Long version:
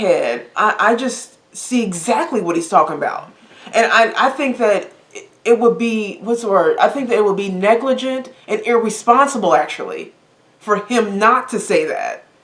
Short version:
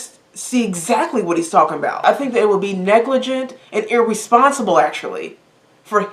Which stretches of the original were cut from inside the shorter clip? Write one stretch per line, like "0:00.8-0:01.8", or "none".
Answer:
0:03.2-0:06.8